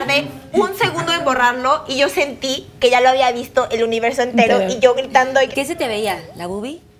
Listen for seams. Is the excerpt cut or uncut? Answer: cut